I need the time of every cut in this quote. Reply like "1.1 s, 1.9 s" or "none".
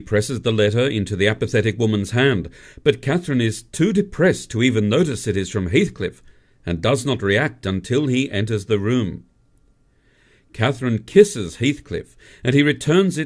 10.1 s